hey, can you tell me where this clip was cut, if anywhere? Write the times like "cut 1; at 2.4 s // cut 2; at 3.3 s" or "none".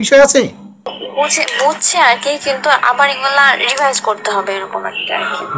none